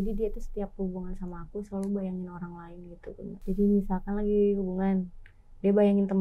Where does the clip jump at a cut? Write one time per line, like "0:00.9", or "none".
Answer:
0:03.4